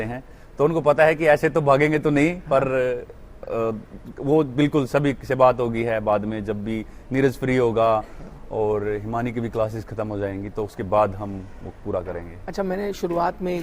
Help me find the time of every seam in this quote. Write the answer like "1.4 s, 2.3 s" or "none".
none